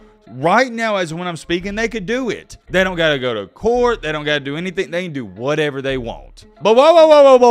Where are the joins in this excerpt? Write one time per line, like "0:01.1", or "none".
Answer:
0:06.4